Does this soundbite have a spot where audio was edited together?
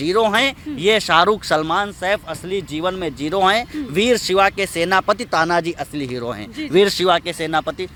no; 0 cuts

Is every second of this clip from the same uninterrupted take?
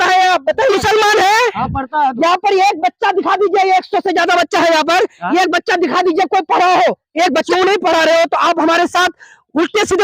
no; 2 cuts; at 0.8 s, 7.5 s

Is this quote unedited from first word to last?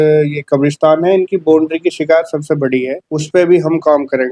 no; 1 cut; at 3.0 s

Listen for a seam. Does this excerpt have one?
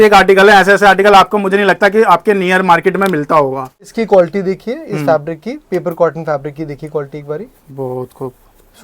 yes; 1 cut; at 3.9 s

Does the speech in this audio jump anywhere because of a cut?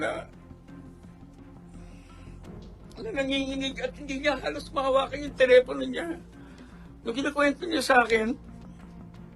yes; 1 cut; at 8.4 s

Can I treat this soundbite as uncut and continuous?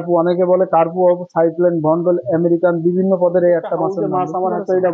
no; 1 cut; at 4.0 s

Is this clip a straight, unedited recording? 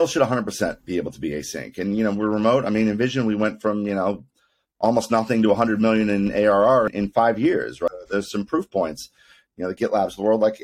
no; 2 cuts; at 6.9 s, 7.9 s

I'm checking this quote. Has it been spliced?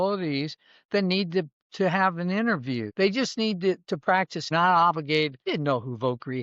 yes; 3 cuts; at 2.9 s, 4.5 s, 5.5 s

